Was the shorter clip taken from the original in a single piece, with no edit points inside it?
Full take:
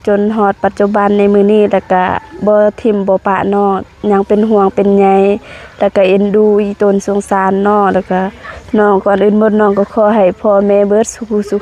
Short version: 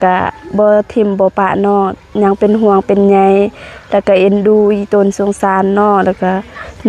yes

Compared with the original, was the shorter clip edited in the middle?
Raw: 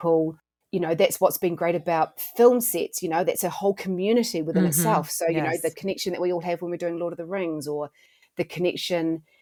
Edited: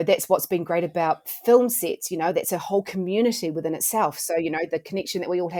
no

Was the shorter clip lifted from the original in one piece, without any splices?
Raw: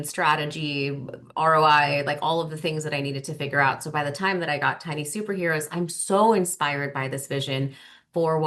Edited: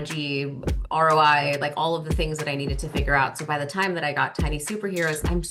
yes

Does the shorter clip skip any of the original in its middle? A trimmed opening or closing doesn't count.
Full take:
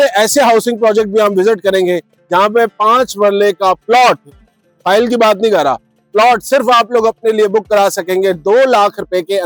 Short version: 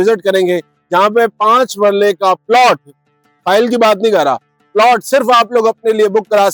no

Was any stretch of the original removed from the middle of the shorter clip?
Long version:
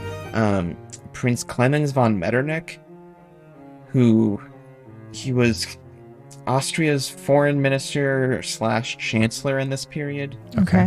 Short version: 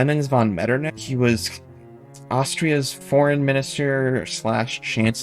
yes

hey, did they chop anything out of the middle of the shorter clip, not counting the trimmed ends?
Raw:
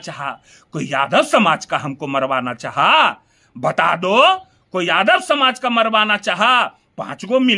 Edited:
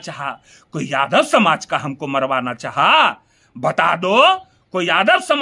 no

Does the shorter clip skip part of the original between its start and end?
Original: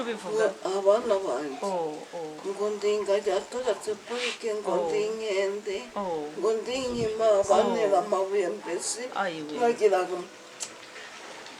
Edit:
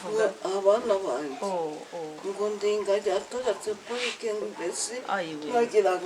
yes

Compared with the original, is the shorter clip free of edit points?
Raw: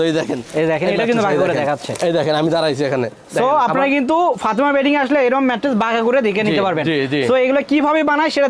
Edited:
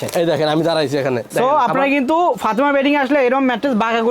no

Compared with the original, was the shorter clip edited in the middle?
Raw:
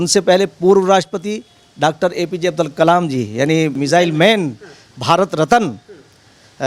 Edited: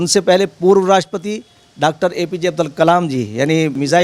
no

